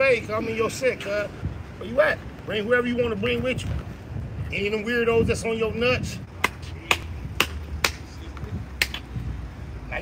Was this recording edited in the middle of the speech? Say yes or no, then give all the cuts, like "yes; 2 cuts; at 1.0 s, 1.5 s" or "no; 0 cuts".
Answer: yes; 3 cuts; at 1.4 s, 2.3 s, 6.2 s